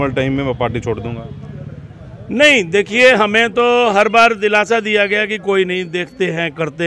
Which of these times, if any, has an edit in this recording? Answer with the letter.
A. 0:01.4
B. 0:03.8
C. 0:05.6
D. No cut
D